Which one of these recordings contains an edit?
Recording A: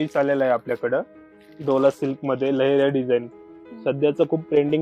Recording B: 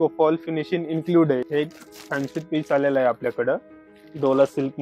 B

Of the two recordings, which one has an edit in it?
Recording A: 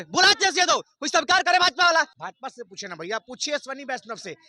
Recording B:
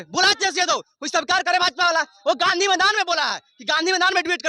A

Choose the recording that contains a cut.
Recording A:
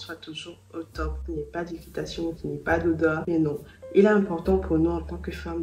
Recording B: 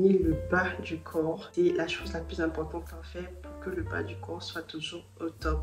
B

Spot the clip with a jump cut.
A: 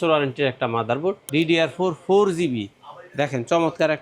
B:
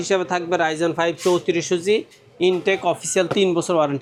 A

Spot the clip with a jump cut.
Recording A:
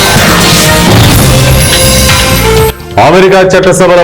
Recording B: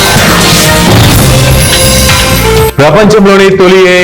B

